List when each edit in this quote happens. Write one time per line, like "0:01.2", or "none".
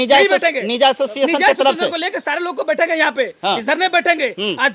none